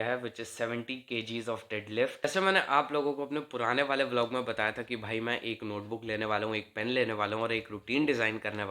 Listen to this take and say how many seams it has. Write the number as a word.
one